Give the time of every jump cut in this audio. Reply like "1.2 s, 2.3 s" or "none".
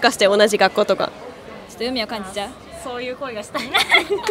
none